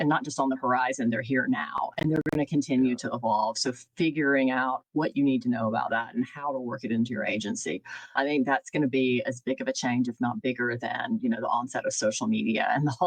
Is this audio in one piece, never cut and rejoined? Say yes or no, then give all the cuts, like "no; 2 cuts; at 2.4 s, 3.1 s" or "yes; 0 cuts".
no; 1 cut; at 8.1 s